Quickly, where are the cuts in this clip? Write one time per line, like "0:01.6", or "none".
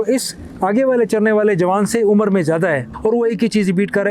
0:02.9